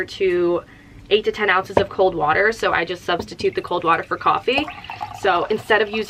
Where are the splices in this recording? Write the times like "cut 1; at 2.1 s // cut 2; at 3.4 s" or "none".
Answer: none